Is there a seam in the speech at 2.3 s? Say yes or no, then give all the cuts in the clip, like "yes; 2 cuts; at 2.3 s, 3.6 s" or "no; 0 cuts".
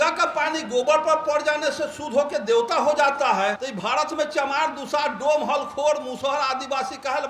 no; 1 cut; at 3.7 s